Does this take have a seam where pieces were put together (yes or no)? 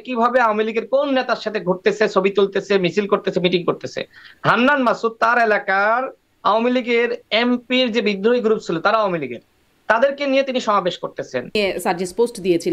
yes